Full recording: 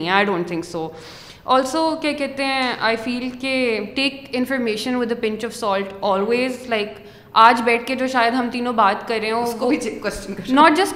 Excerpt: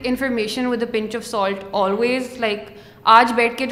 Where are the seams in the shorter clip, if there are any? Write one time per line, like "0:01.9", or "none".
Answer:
none